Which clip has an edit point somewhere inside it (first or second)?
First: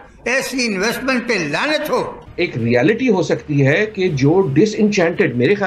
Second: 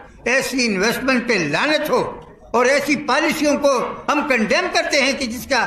first